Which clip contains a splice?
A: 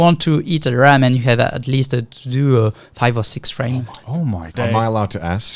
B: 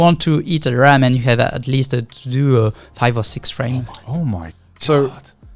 A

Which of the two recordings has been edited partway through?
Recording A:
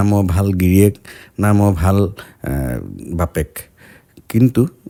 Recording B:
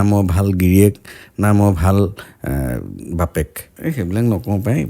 B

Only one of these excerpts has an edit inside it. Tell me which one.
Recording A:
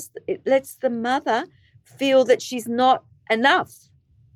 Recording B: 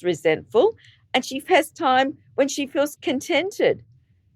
B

